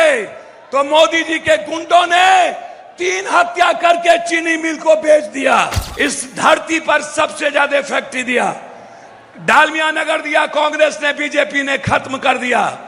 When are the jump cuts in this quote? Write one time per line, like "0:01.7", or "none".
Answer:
0:05.8